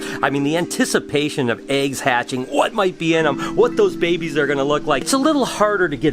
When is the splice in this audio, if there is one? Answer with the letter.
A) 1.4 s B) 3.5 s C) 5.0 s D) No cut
C